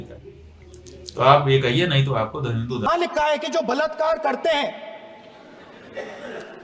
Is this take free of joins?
no; 1 cut; at 2.9 s

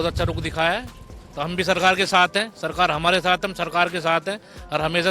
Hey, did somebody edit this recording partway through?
no; 0 cuts

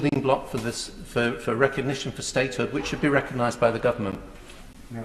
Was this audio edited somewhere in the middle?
no; 0 cuts

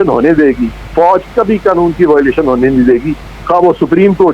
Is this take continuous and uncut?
yes; 0 cuts

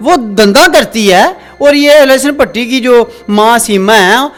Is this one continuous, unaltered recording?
yes; 0 cuts

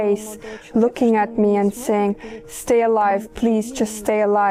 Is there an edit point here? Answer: no; 0 cuts

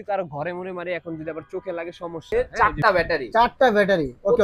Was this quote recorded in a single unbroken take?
no; 1 cut; at 2.2 s

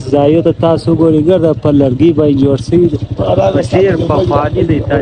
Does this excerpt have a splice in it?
no; 0 cuts

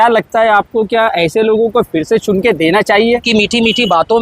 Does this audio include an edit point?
yes; 1 cut; at 3.2 s

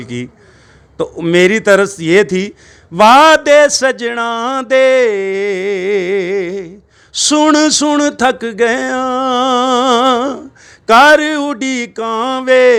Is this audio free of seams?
yes; 0 cuts

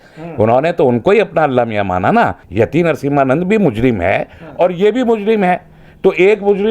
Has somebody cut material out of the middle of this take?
yes; 1 cut; at 2.4 s

